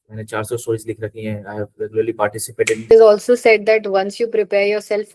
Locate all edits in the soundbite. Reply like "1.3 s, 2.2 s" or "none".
2.9 s